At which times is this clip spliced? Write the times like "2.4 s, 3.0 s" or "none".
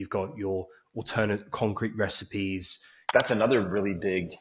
2.9 s